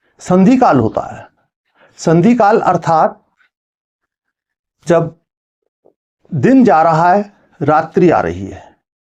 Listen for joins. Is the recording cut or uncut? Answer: uncut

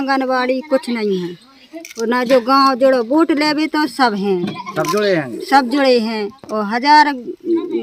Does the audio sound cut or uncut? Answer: uncut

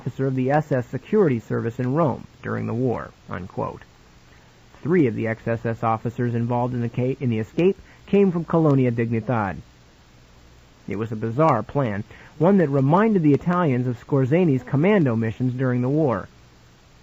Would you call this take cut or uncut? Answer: cut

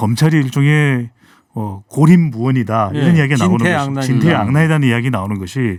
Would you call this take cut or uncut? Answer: uncut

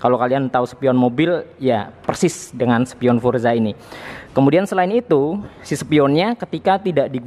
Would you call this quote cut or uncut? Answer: uncut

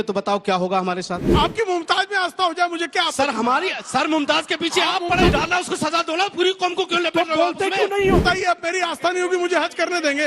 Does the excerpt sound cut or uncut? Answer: cut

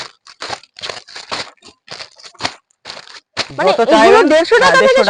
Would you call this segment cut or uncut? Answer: uncut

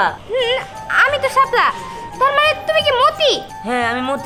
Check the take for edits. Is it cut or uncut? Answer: uncut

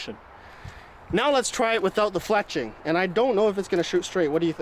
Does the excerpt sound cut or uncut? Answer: uncut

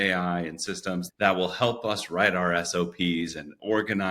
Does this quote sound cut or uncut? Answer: cut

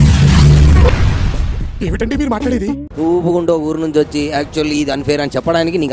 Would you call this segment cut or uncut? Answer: uncut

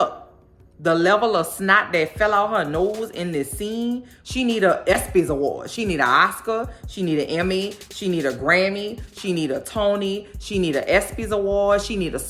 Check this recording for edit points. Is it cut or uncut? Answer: uncut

